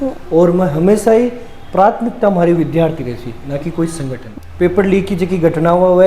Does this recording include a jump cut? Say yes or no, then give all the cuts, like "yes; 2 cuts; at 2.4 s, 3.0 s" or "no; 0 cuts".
yes; 1 cut; at 4.2 s